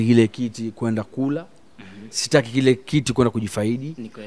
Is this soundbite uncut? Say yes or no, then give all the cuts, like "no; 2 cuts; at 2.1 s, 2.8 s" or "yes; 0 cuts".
yes; 0 cuts